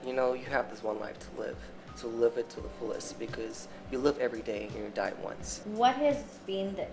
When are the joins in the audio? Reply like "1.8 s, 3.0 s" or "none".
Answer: 5.5 s